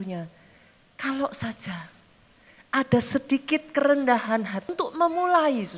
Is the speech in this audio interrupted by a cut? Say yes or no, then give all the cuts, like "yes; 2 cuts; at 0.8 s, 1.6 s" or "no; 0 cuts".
yes; 1 cut; at 4.7 s